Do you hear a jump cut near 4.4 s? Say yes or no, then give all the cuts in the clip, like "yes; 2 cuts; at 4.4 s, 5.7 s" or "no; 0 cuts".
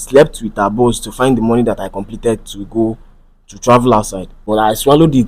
yes; 1 cut; at 4.4 s